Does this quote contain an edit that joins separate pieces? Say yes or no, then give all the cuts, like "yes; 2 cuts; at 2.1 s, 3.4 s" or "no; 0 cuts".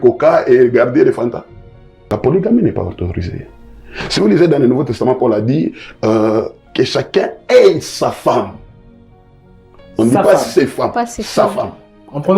yes; 1 cut; at 2.1 s